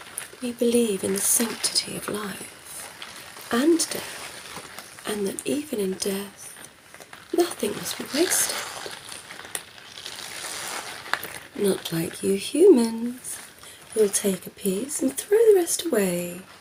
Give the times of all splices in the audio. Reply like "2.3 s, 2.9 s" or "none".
none